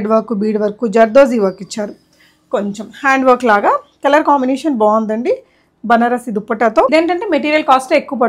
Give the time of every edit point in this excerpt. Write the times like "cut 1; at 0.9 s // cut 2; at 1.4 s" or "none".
cut 1; at 6.9 s